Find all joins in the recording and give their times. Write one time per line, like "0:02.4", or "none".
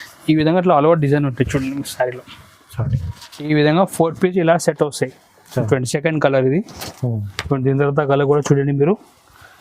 0:03.5